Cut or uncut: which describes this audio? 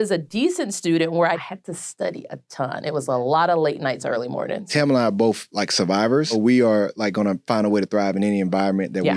cut